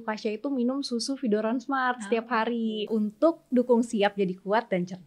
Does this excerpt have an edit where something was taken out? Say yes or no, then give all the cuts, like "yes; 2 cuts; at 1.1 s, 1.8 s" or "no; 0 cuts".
yes; 1 cut; at 2.9 s